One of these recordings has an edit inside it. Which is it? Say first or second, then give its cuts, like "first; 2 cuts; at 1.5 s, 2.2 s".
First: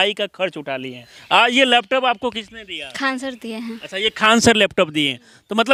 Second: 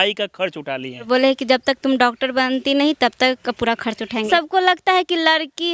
second; 2 cuts; at 1.0 s, 4.2 s